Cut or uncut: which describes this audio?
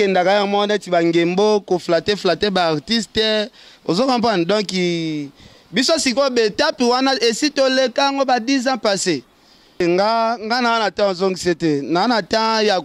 cut